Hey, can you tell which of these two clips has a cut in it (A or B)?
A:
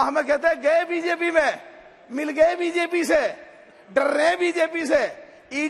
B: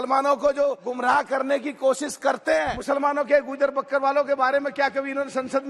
B